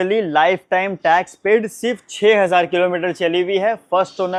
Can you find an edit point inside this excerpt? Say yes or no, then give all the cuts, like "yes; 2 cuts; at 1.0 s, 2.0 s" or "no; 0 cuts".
no; 0 cuts